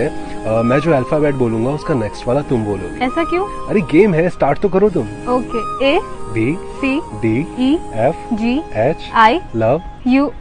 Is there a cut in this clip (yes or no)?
no